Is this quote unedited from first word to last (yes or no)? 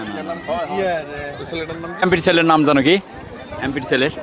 no